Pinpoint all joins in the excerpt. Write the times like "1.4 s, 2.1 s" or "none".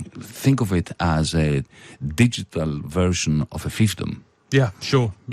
3.2 s